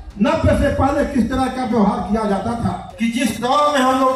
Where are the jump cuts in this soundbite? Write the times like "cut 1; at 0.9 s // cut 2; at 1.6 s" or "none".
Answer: cut 1; at 2.8 s